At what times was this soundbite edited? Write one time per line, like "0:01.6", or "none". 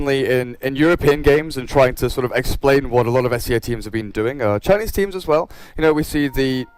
none